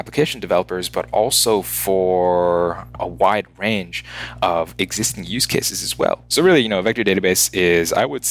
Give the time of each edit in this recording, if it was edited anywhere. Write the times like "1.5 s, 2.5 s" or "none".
6.2 s